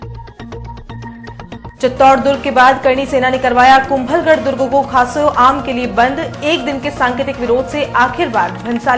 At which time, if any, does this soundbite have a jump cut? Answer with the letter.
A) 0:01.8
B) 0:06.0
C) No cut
A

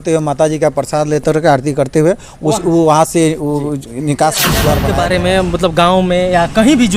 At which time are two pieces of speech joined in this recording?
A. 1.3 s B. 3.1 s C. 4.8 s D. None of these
C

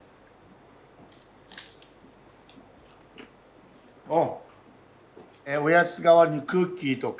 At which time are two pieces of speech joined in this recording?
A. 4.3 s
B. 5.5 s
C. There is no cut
B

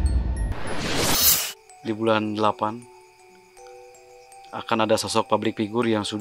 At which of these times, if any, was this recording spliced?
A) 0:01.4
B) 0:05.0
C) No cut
A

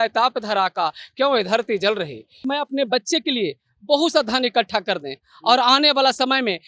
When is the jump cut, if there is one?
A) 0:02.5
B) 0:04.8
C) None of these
A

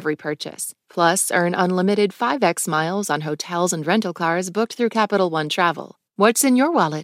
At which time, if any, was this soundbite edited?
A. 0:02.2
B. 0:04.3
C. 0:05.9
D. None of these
C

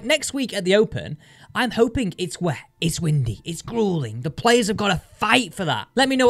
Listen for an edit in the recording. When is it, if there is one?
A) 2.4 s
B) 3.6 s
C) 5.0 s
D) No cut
D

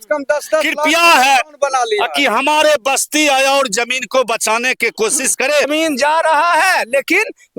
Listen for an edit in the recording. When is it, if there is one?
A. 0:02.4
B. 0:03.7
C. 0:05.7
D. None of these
C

